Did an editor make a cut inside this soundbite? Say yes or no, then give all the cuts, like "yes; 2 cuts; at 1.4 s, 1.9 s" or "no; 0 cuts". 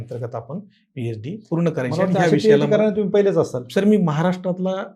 no; 0 cuts